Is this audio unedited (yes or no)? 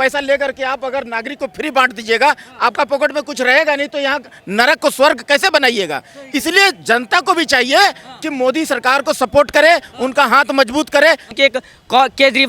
no